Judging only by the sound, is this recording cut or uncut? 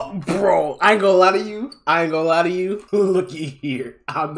cut